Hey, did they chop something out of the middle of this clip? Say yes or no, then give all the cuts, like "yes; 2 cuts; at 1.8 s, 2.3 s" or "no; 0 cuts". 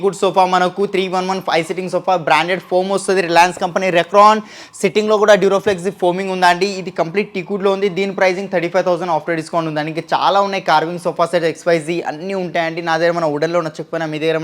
no; 0 cuts